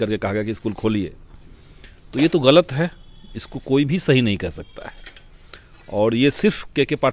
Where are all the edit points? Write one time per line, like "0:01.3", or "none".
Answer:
none